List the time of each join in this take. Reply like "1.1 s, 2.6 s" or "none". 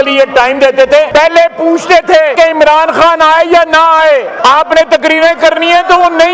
1.1 s, 2.3 s, 4.3 s